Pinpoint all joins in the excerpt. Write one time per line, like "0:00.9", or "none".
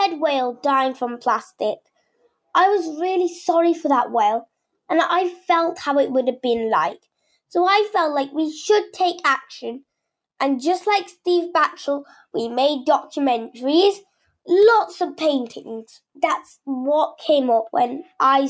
0:16.0
0:17.7